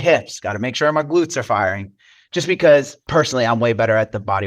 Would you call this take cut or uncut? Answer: cut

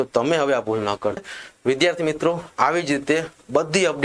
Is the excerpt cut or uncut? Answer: cut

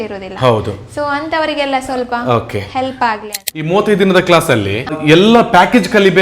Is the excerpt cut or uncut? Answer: cut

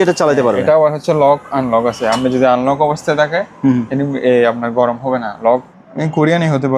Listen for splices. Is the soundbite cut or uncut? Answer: cut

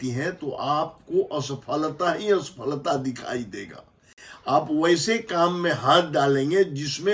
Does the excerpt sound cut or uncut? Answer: uncut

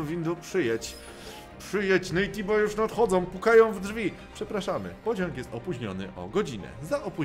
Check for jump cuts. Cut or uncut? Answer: uncut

